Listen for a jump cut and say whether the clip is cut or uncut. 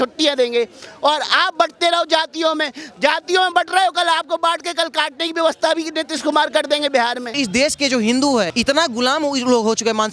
cut